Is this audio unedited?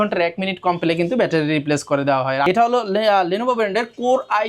no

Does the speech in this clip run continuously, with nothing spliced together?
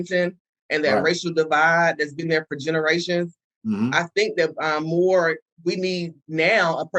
yes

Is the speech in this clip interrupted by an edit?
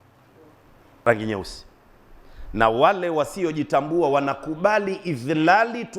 yes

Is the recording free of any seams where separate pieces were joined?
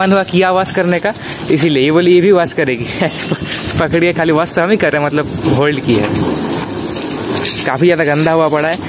yes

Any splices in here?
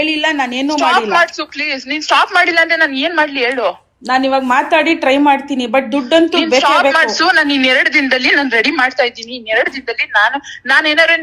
no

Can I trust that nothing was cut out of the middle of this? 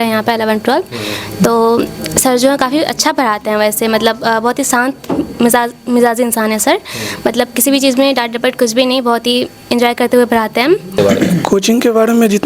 no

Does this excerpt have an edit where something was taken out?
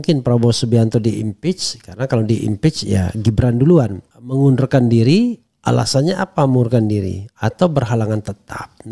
no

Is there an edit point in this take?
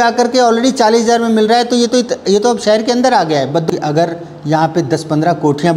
yes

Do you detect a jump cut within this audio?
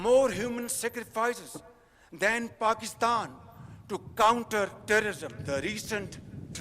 yes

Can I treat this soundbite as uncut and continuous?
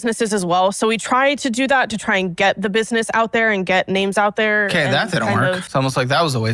no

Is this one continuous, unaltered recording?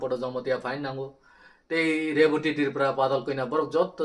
yes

